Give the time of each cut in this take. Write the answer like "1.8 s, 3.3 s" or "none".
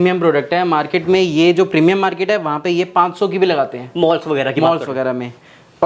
none